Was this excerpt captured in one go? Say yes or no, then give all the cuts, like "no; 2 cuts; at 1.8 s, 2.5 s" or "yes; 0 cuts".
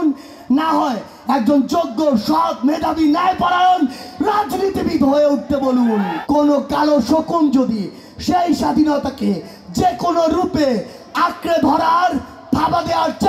no; 1 cut; at 6.2 s